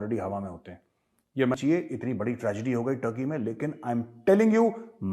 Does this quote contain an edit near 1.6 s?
yes; 1 cut; at 1.6 s

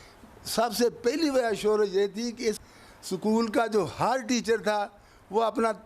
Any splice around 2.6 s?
yes; 1 cut; at 2.6 s

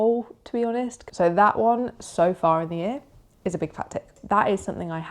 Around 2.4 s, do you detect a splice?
no; 2 cuts; at 1.0 s, 4.2 s

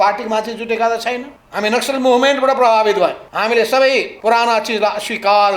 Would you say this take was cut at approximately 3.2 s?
yes; 3 cuts; at 1.4 s, 3.2 s, 4.1 s

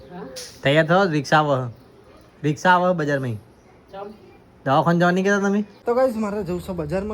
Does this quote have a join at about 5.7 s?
yes; 1 cut; at 5.7 s

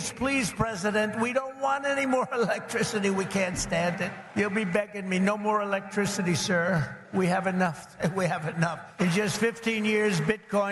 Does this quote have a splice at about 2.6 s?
no; 3 cuts; at 4.2 s, 7.0 s, 8.8 s

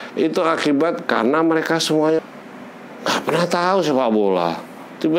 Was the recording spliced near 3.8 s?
no; 1 cut; at 2.2 s

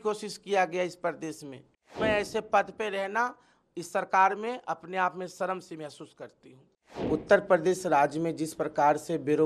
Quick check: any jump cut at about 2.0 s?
yes; 2 cuts; at 2.0 s, 6.9 s

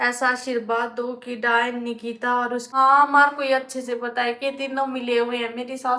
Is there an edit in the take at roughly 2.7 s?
yes; 1 cut; at 2.7 s

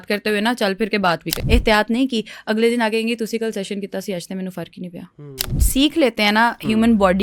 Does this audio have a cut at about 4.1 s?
no; 2 cuts; at 1.4 s, 5.5 s

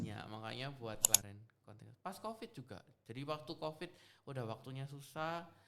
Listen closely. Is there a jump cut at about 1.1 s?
yes; 1 cut; at 1.1 s

